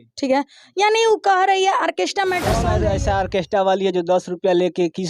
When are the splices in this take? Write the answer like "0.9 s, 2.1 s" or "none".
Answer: 2.7 s